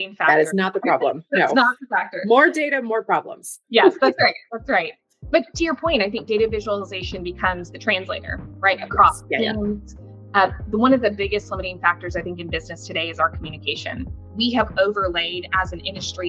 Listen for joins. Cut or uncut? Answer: cut